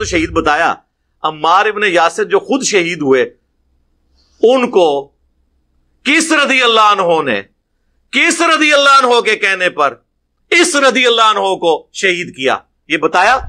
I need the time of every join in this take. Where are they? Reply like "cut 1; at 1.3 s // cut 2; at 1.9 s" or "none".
none